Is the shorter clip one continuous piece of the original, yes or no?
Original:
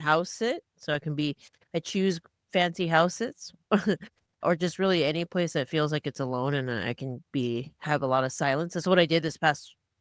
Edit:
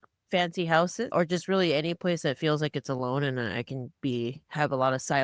no